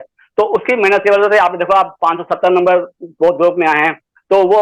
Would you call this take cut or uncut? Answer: uncut